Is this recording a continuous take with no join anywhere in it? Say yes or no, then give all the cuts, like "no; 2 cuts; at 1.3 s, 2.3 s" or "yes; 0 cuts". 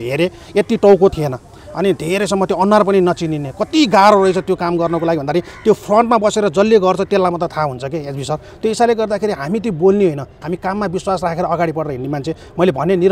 no; 1 cut; at 1.1 s